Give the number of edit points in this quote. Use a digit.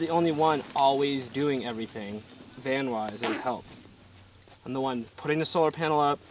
0